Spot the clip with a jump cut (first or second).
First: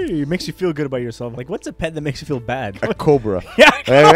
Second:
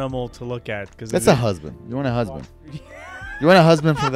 first